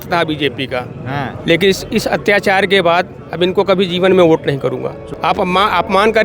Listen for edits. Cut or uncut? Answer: cut